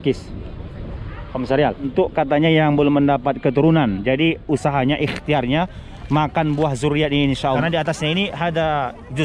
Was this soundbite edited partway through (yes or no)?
yes